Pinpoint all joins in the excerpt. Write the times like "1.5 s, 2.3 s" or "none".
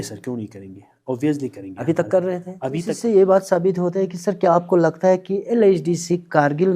2.9 s